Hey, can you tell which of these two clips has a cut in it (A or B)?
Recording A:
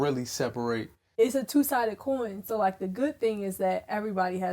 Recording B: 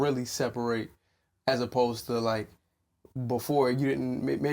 A